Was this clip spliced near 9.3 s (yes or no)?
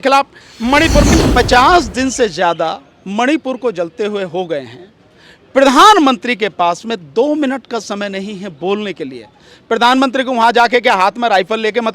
no